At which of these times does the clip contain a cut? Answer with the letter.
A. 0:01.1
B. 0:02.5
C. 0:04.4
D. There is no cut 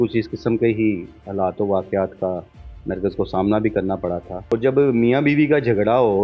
C